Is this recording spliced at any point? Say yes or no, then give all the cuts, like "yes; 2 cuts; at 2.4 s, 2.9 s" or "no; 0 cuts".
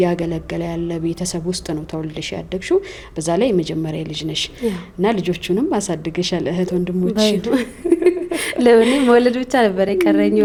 no; 0 cuts